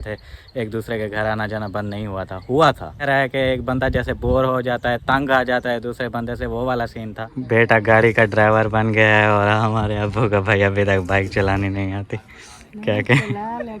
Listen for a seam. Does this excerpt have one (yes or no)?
yes